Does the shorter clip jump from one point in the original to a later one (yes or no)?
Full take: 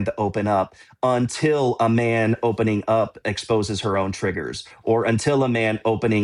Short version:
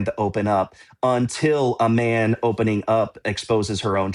no